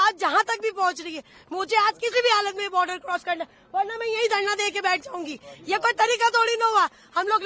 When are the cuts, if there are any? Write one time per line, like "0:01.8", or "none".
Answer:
none